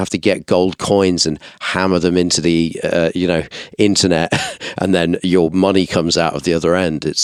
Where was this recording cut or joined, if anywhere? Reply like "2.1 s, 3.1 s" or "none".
none